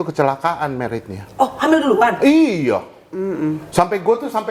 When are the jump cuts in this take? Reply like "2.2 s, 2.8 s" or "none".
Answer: none